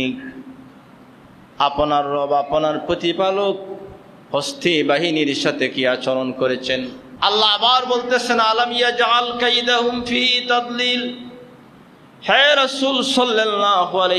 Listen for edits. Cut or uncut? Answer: cut